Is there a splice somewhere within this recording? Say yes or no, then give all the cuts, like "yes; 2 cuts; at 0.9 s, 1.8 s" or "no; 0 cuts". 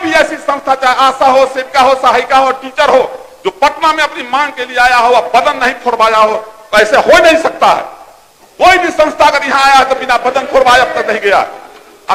no; 0 cuts